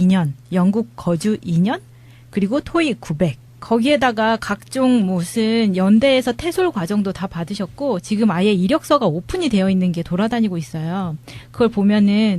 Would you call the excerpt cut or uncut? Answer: cut